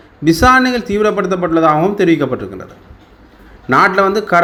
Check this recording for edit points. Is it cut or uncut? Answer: uncut